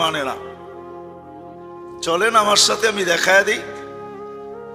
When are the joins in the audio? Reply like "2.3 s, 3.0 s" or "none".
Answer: 3.6 s

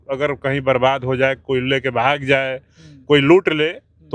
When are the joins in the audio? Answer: none

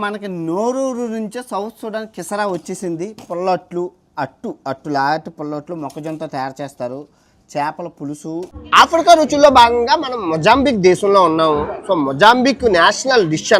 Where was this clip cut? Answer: 8.6 s

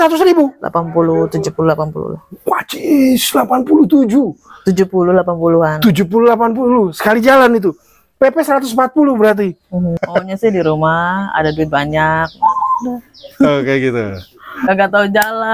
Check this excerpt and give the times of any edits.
10.0 s, 14.5 s

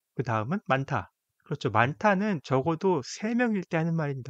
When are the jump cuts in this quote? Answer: none

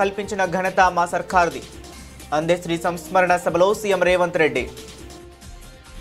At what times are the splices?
4.9 s

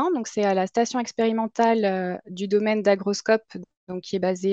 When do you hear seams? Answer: none

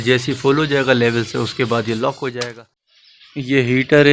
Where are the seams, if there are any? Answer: 2.4 s

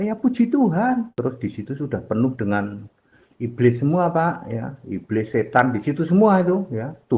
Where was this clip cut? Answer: 1.1 s

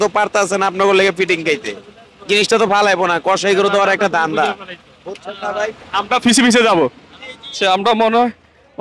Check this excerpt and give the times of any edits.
7.5 s

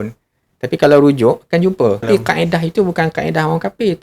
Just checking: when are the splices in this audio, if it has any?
2.1 s

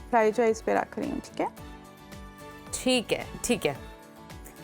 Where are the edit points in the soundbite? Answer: none

